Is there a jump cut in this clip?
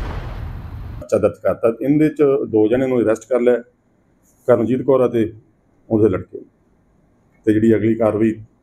yes; 1 cut; at 1.1 s

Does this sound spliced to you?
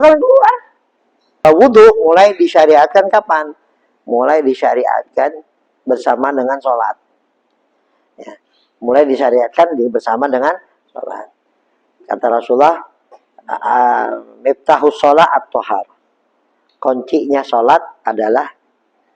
yes; 1 cut; at 1.4 s

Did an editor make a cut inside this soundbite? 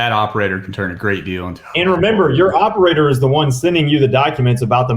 no; 0 cuts

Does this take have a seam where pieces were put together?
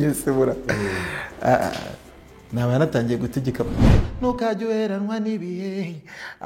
yes; 1 cut; at 4.0 s

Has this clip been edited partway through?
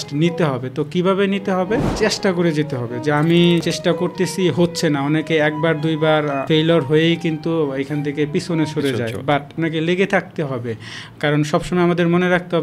yes; 4 cuts; at 1.9 s, 3.7 s, 6.5 s, 9.5 s

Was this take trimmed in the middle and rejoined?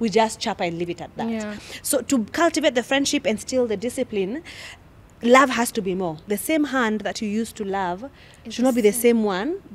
yes; 1 cut; at 6.2 s

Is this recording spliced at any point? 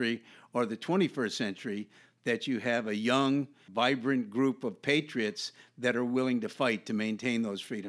yes; 1 cut; at 3.6 s

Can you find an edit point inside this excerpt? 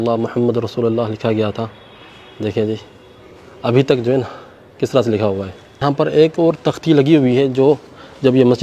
yes; 1 cut; at 5.8 s

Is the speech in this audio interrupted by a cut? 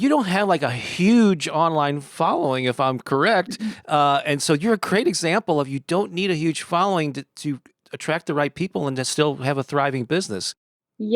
no; 0 cuts

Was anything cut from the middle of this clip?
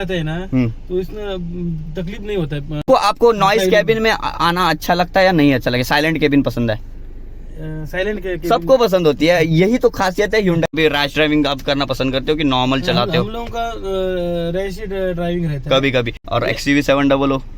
yes; 3 cuts; at 2.8 s, 10.7 s, 16.2 s

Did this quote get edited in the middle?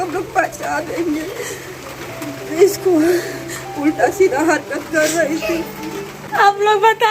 yes; 1 cut; at 6.2 s

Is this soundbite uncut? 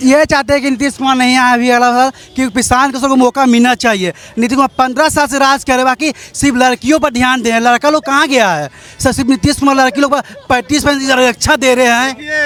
yes; 0 cuts

